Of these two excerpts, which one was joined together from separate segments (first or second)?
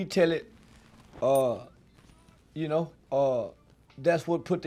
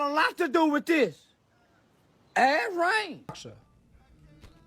second